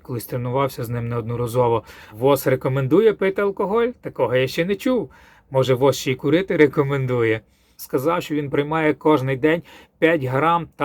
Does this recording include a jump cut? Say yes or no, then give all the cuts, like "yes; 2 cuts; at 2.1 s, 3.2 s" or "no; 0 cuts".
yes; 2 cuts; at 2.1 s, 7.8 s